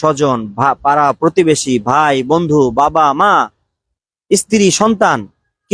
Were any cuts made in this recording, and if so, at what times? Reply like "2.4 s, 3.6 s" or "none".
none